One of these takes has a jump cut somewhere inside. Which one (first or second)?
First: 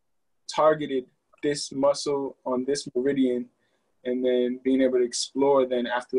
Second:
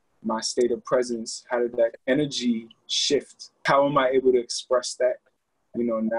second